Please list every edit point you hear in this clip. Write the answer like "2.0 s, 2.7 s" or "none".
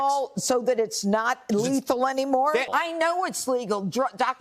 2.7 s

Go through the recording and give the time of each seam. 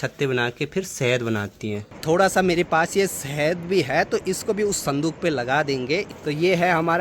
1.9 s, 6.1 s

